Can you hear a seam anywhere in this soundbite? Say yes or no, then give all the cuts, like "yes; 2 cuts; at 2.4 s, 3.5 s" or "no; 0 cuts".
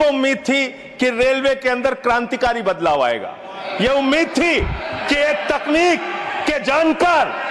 no; 0 cuts